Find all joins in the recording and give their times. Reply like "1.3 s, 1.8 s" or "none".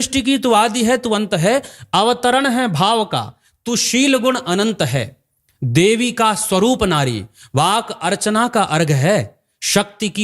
none